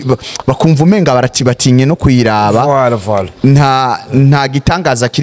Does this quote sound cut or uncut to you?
uncut